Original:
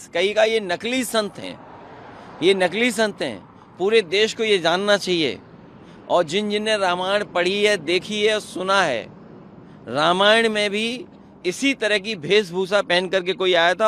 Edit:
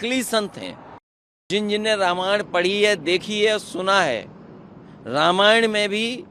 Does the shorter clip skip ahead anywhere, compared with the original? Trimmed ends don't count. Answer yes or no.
yes